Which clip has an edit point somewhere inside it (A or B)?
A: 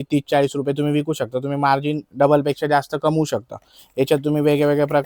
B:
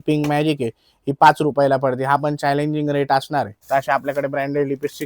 B